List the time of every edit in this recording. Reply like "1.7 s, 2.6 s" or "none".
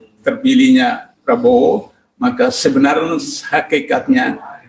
none